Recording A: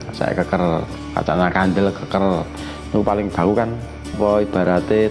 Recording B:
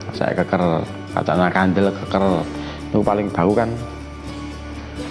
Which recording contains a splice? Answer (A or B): A